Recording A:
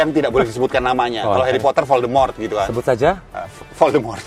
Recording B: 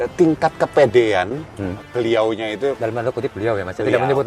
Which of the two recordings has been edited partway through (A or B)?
B